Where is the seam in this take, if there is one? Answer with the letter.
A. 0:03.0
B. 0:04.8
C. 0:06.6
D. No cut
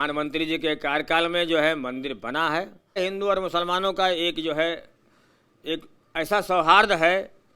A